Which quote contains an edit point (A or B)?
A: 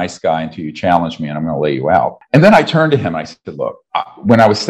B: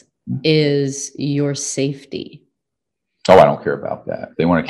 A